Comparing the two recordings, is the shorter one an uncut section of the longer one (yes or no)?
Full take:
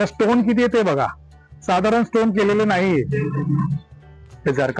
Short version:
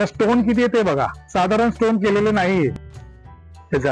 no